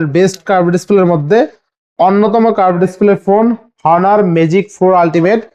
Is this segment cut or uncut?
uncut